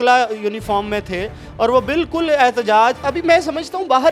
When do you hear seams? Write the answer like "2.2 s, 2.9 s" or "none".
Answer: none